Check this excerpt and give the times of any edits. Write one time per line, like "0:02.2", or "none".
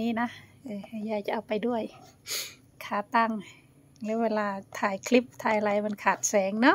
none